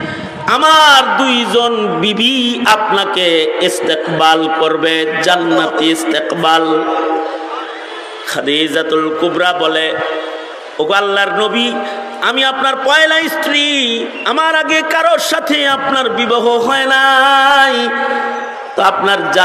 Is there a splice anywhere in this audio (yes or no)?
no